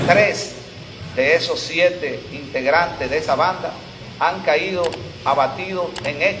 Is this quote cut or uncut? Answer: uncut